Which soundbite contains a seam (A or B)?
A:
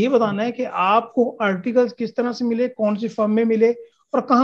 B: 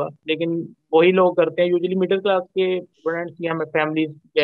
B